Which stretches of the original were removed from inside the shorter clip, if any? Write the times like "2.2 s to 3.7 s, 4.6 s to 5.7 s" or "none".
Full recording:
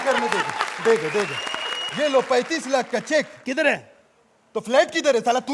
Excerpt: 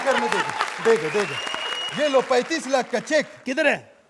none